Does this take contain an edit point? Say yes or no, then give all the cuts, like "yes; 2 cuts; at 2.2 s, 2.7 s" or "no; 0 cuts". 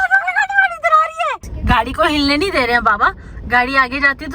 yes; 1 cut; at 1.5 s